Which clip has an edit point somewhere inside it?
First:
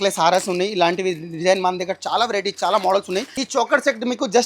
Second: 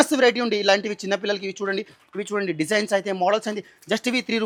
first; 1 cut; at 3.4 s

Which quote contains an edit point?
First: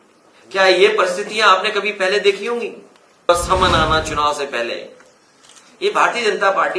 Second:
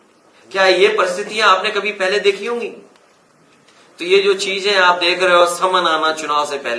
first; 1 cut; at 3.3 s

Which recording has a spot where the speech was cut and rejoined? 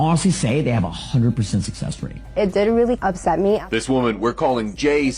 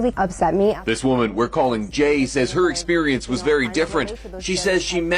second; 1 cut; at 3.7 s

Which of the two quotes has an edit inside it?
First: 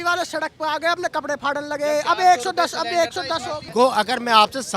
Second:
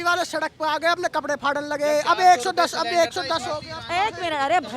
first; 1 cut; at 3.7 s

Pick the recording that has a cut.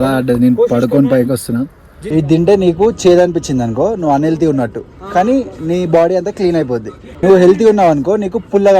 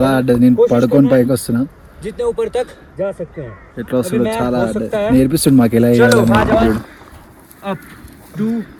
first; 2 cuts; at 2.1 s, 7.0 s

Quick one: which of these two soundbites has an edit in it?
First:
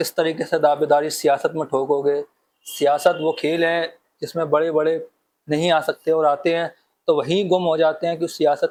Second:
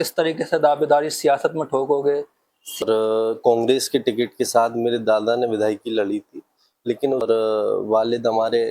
second; 2 cuts; at 2.8 s, 7.2 s

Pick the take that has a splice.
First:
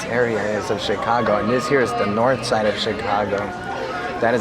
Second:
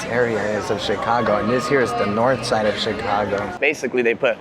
second; 1 cut; at 3.5 s

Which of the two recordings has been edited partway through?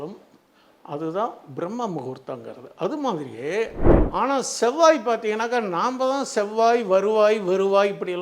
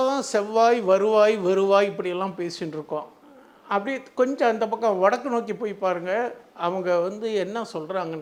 first; 1 cut; at 3.8 s

